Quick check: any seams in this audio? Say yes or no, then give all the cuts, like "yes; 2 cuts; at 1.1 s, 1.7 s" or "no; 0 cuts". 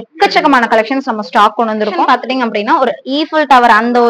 yes; 1 cut; at 2.0 s